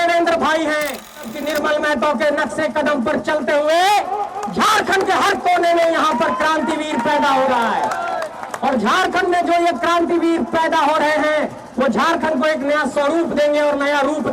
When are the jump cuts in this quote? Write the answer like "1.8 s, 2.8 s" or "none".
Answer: 1.4 s